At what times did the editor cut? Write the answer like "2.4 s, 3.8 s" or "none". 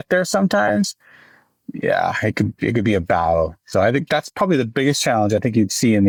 none